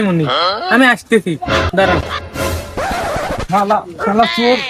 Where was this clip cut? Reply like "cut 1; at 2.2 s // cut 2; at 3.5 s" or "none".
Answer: none

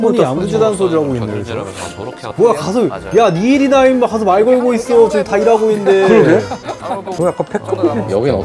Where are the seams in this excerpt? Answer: cut 1; at 2.3 s // cut 2; at 7.1 s

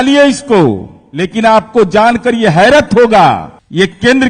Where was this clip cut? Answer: none

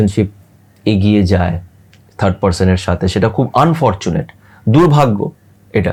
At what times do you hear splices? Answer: none

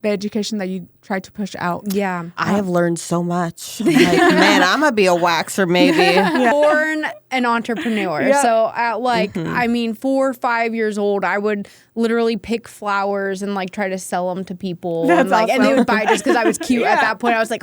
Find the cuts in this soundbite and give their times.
cut 1; at 6.5 s

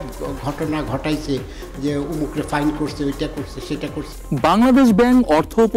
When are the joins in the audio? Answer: cut 1; at 4.1 s

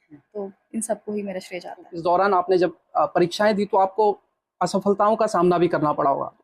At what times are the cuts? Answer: cut 1; at 1.9 s

